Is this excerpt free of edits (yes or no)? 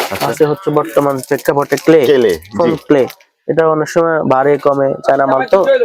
yes